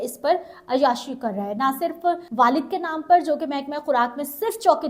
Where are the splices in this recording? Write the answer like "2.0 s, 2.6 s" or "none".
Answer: 2.2 s